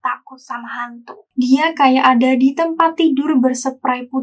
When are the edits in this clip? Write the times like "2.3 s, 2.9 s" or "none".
1.3 s